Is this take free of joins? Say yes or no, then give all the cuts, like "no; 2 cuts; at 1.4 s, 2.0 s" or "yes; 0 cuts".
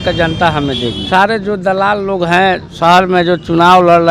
no; 1 cut; at 1.0 s